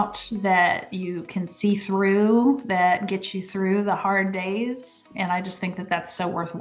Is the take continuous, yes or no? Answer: no